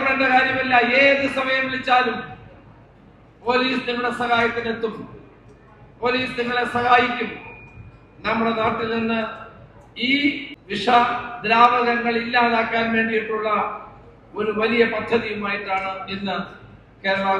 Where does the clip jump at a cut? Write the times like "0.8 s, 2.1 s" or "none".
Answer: 10.5 s